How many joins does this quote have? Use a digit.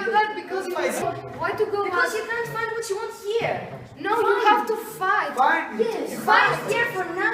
1